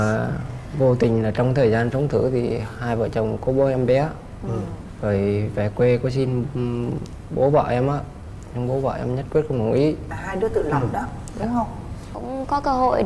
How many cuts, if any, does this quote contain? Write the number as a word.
one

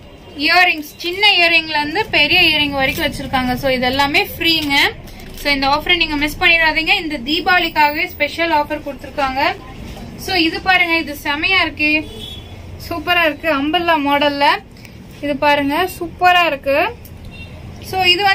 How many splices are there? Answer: zero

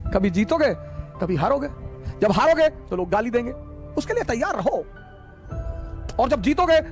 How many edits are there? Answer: zero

